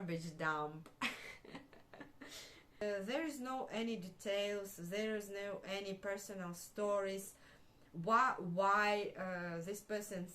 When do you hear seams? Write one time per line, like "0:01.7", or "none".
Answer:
0:02.8